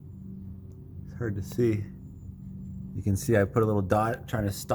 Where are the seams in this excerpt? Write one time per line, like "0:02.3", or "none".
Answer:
0:02.9